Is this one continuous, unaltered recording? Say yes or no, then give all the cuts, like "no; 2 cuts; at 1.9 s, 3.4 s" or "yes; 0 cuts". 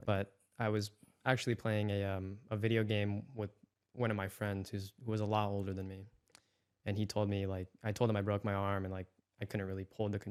yes; 0 cuts